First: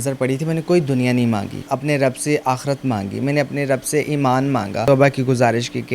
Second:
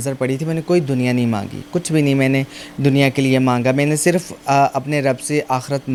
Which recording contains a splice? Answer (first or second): first